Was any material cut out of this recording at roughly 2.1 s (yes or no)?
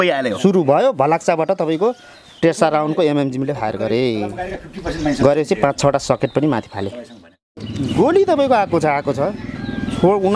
no